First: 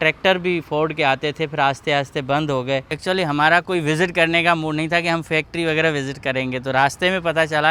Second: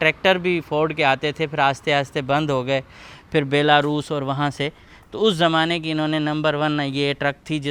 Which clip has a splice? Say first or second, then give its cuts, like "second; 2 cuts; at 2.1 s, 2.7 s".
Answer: first; 1 cut; at 2.9 s